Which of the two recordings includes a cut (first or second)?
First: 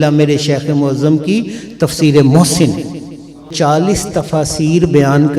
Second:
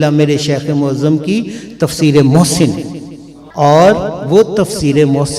first